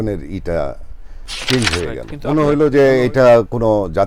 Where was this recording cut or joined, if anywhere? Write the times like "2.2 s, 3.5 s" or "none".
2.1 s